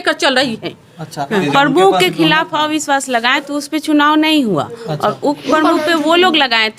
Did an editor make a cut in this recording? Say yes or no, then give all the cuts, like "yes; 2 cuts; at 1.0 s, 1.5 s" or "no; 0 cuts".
yes; 1 cut; at 1.4 s